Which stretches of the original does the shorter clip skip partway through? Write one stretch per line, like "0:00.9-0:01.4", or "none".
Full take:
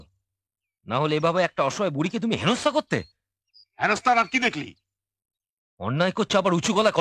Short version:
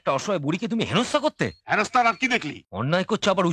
0:03.1-0:03.7
0:04.7-0:05.7